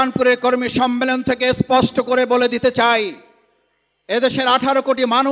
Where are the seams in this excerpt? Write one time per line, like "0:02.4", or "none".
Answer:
none